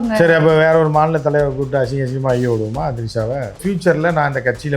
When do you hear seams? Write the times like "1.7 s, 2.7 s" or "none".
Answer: 3.6 s